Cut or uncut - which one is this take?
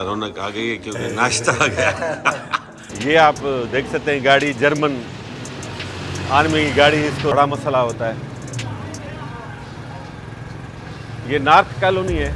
cut